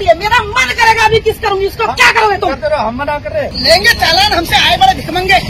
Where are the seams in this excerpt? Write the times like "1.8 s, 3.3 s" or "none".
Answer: 3.5 s

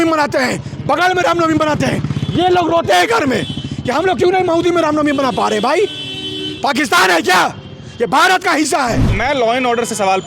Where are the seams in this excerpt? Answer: 9.1 s

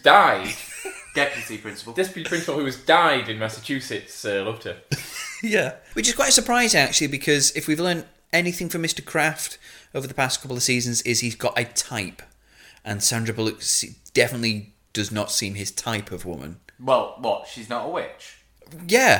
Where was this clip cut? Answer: 5.8 s, 8.1 s

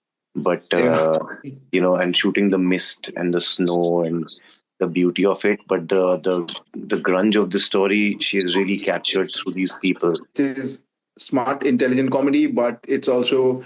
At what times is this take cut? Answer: 6.7 s, 10.3 s

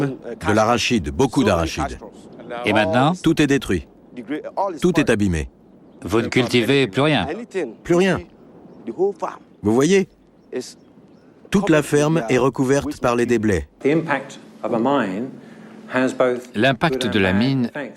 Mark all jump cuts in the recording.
13.7 s

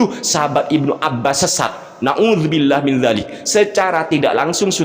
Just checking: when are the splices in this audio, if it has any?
1.4 s

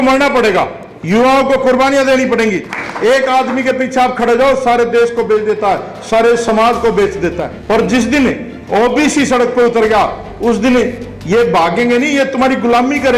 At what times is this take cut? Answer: 2.7 s, 7.5 s

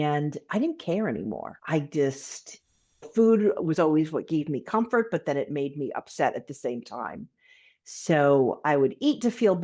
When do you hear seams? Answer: 1.5 s

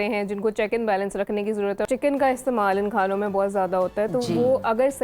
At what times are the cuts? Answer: 1.8 s

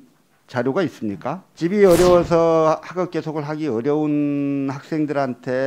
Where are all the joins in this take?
1.5 s

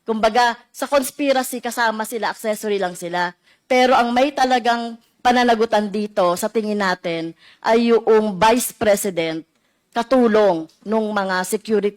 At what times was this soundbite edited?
none

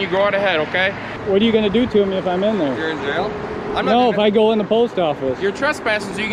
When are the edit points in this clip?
1.2 s

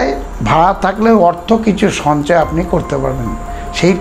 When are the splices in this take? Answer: none

